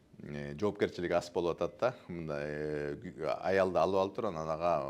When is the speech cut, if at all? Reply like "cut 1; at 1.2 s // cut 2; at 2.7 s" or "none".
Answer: none